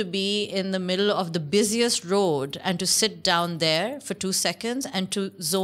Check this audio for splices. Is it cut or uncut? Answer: uncut